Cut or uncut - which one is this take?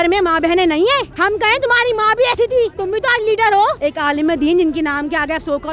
cut